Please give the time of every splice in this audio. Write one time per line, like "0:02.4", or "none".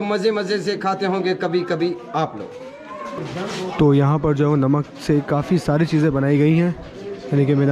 0:03.2